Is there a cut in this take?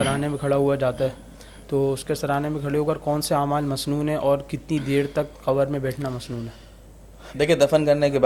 no; 0 cuts

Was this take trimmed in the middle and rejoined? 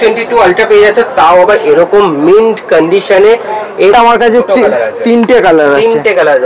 yes; 1 cut; at 3.9 s

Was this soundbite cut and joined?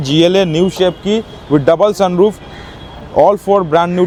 no; 0 cuts

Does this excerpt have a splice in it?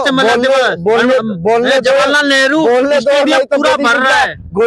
no; 0 cuts

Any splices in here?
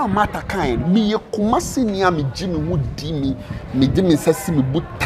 no; 0 cuts

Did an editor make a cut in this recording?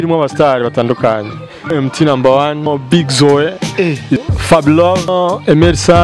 yes; 4 cuts; at 1.7 s, 2.7 s, 4.2 s, 5.1 s

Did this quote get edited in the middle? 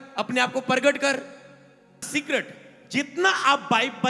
yes; 1 cut; at 2.1 s

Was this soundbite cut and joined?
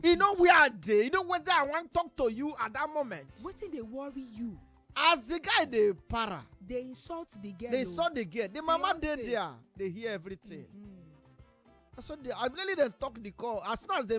no; 0 cuts

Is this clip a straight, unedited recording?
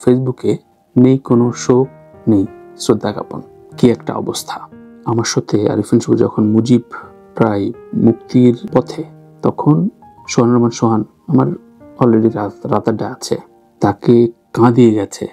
no; 1 cut; at 4.8 s

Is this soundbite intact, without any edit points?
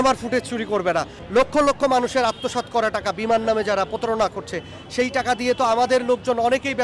no; 1 cut; at 1.2 s

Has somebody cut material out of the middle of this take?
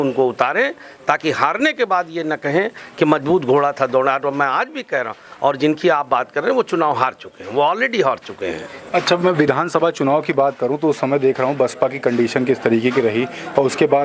no; 0 cuts

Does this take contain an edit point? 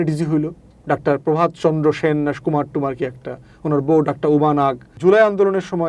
yes; 1 cut; at 4.9 s

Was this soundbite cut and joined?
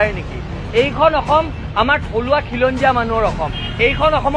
no; 0 cuts

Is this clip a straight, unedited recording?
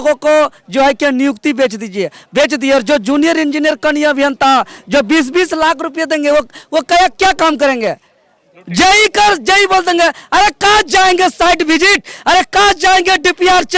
yes; 0 cuts

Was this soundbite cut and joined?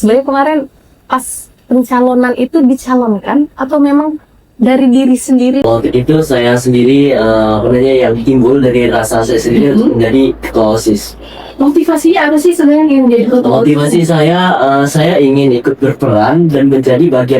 yes; 1 cut; at 5.6 s

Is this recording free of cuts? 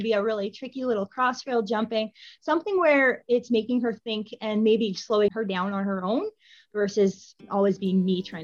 no; 2 cuts; at 5.3 s, 7.3 s

